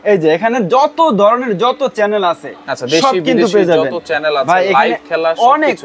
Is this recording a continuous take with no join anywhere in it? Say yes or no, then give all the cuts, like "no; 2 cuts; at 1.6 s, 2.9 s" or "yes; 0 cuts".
yes; 0 cuts